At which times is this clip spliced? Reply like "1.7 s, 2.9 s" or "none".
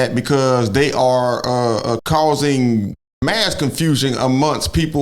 2.0 s